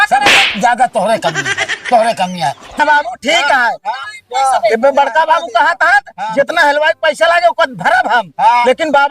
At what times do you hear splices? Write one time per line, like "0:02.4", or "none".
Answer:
0:02.8